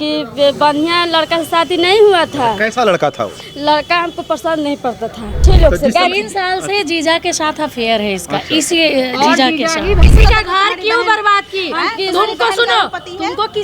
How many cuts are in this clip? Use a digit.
2